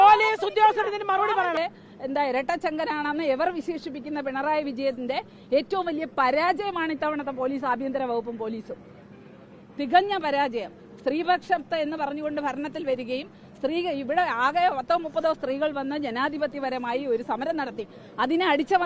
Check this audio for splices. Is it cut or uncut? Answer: cut